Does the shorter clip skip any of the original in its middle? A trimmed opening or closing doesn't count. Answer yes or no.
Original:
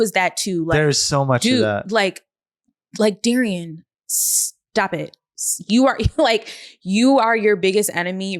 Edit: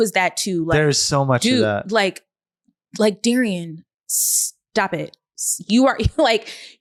no